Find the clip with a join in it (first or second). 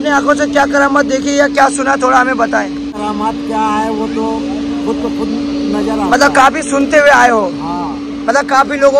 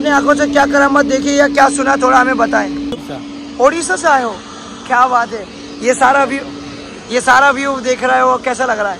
second